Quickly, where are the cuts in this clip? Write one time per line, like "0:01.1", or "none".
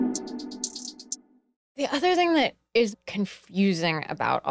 none